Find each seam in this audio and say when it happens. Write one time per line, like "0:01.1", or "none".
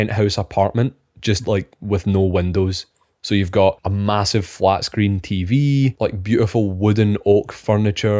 none